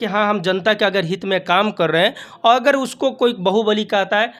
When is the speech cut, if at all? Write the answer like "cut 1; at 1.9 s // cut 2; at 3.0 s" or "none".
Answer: none